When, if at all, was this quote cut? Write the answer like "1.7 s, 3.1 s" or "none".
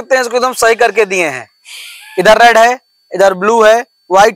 none